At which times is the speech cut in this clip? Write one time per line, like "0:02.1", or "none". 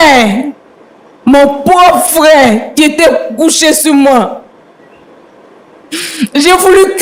none